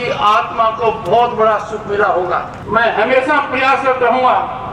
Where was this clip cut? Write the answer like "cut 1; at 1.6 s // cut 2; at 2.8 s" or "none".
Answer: cut 1; at 2.6 s